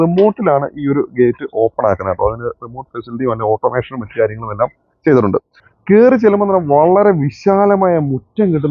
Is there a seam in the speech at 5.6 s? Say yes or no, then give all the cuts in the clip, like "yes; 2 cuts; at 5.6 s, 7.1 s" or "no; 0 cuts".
yes; 1 cut; at 5.6 s